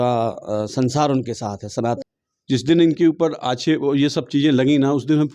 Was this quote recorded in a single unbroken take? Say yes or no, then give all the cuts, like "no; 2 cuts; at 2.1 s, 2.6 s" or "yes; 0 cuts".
no; 1 cut; at 2.1 s